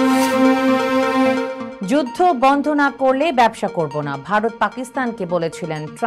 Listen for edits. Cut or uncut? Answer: cut